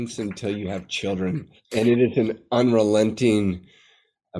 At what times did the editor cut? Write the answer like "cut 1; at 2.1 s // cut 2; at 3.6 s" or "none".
cut 1; at 1.5 s